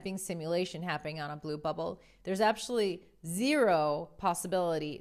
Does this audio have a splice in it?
no; 0 cuts

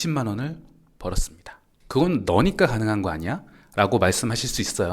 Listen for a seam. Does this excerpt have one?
no; 0 cuts

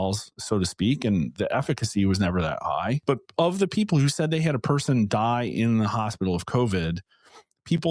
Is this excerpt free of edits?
no; 1 cut; at 3.0 s

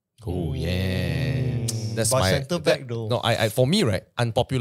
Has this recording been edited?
no; 0 cuts

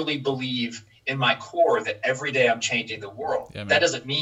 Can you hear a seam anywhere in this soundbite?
no; 0 cuts

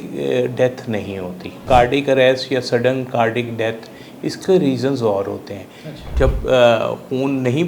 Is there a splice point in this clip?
yes; 2 cuts; at 1.6 s, 6.0 s

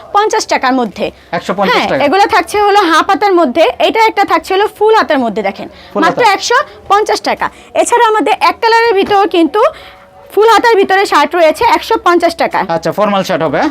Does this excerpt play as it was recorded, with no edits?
yes; 0 cuts

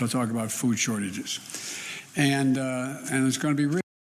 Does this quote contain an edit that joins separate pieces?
no; 0 cuts

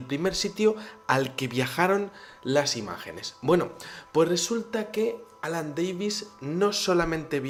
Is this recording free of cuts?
yes; 0 cuts

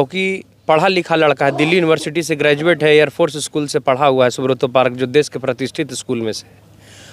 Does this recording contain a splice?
no; 0 cuts

